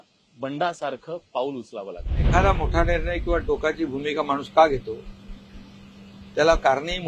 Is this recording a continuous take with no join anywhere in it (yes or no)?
no